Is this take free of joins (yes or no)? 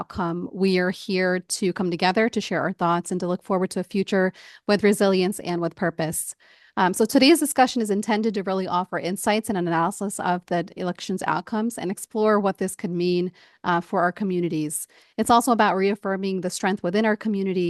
yes